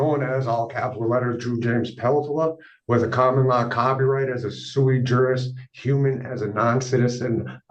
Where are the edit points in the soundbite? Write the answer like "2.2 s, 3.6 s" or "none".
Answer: none